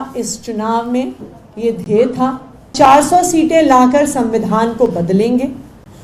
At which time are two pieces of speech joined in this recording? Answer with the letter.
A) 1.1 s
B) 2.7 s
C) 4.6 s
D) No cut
B